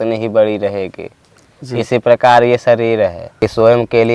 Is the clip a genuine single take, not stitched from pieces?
no; 1 cut; at 3.3 s

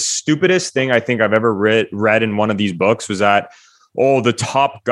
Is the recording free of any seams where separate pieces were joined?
yes; 0 cuts

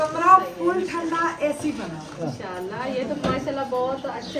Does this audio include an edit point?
yes; 1 cut; at 2.2 s

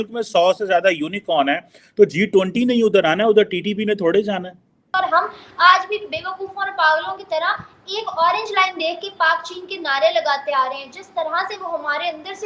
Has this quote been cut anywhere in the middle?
yes; 1 cut; at 4.8 s

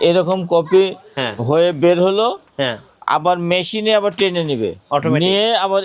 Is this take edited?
no; 0 cuts

